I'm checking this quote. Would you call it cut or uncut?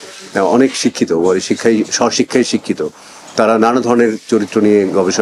uncut